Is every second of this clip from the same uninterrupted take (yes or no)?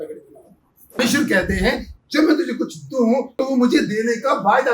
no